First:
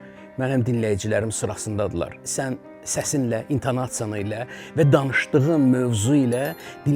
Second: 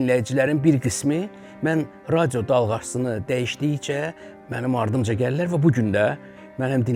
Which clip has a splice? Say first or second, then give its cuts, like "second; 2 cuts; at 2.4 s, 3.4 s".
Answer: first; 1 cut; at 2.2 s